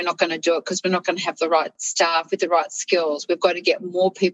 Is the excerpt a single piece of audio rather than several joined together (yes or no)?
no